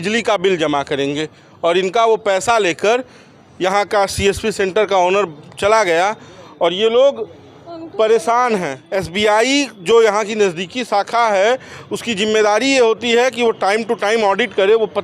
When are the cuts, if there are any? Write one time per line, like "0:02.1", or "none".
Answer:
0:08.8